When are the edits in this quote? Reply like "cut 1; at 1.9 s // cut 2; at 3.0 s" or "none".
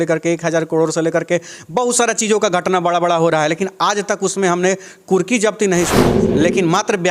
cut 1; at 6.2 s